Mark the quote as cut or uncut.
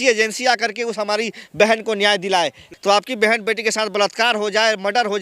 cut